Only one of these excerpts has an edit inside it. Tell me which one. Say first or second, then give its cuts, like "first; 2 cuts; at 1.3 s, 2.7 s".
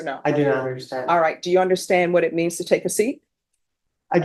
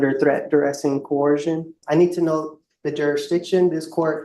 second; 1 cut; at 1.8 s